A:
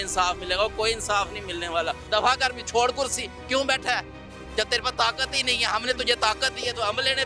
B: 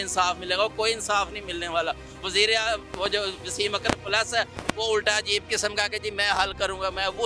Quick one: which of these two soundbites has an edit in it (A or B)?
A